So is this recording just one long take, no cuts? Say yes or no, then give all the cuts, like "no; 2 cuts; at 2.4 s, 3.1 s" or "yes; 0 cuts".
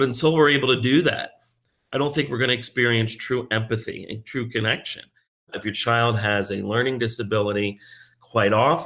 no; 1 cut; at 5.5 s